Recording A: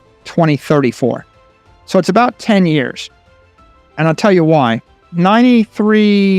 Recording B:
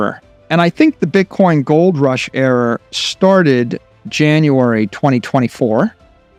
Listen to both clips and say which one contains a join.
A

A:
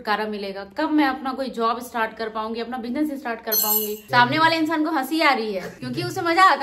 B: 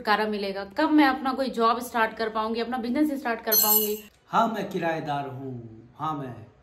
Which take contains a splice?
B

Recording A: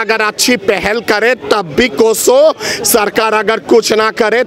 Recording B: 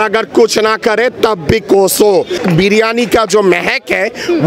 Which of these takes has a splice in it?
B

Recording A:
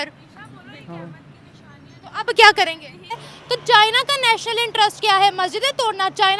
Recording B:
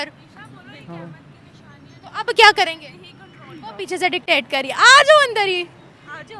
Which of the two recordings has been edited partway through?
A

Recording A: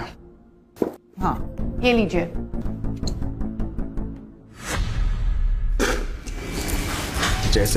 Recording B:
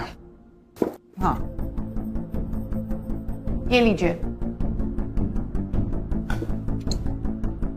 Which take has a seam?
A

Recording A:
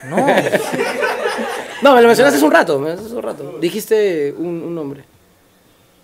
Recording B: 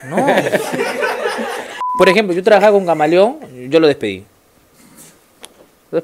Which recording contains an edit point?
B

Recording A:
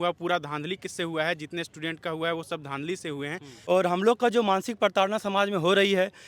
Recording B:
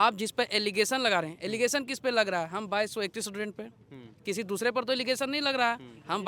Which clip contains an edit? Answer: A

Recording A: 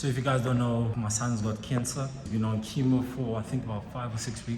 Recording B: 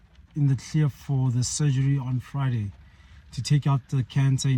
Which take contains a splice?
A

